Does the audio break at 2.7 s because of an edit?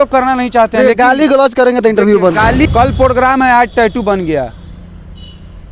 yes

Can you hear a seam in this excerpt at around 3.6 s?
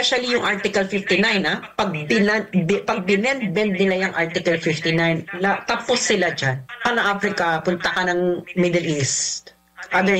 no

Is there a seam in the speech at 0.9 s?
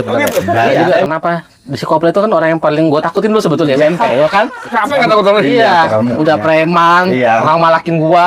yes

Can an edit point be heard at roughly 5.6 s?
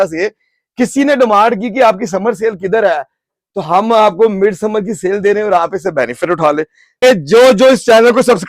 no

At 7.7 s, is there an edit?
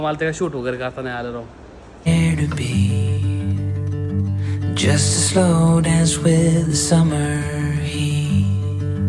no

